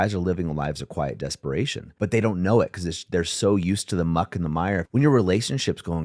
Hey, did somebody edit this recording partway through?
yes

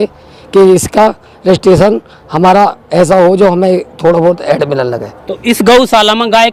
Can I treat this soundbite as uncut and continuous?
yes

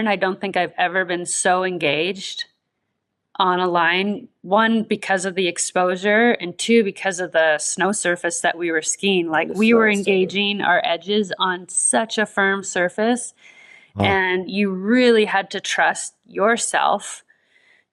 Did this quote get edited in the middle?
no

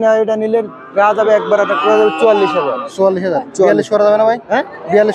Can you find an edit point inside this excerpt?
no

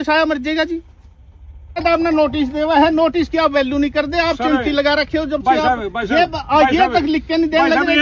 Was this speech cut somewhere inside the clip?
yes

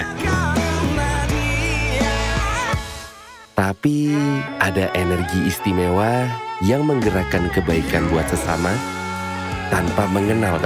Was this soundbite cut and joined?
no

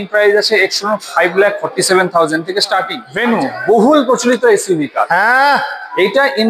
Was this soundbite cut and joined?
yes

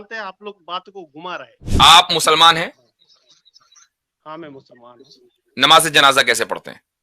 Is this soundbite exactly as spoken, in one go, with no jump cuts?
no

